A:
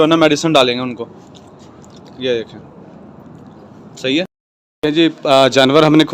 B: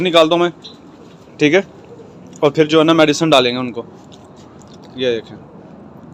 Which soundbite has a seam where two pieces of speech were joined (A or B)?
A